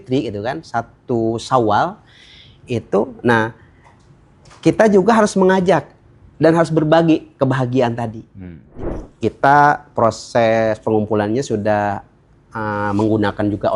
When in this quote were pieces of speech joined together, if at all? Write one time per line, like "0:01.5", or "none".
0:08.7